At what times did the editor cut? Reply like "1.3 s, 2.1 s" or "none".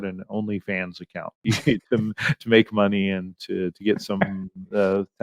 1.4 s